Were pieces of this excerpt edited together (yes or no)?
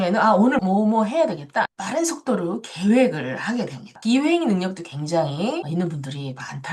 yes